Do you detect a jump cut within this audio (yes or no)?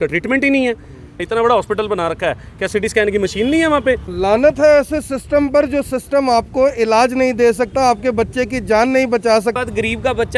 yes